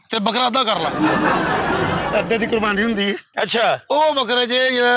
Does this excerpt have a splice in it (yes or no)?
yes